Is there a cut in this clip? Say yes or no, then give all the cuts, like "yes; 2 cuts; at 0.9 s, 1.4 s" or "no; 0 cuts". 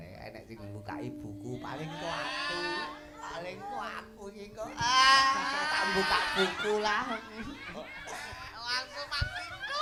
no; 0 cuts